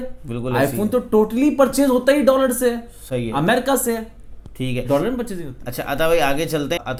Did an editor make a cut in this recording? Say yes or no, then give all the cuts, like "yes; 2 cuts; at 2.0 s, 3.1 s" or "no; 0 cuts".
no; 0 cuts